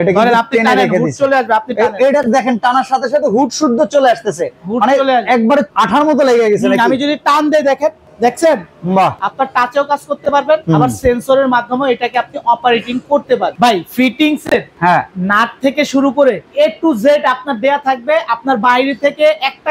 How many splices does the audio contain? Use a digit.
7